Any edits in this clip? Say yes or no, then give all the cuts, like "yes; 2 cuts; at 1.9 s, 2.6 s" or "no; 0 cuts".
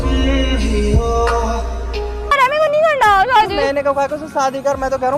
yes; 1 cut; at 2.3 s